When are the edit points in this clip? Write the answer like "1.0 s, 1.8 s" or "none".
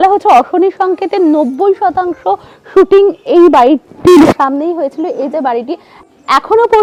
none